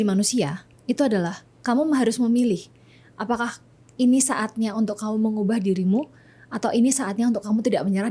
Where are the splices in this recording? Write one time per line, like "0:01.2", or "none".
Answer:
none